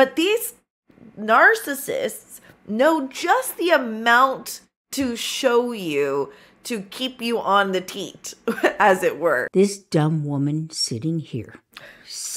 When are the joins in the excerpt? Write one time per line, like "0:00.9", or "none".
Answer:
0:09.5